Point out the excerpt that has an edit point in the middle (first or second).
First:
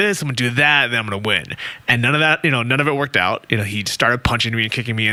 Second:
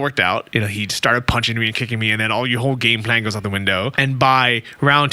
second